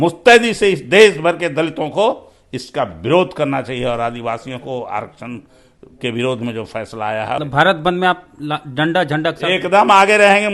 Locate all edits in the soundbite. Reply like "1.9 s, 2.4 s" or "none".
7.4 s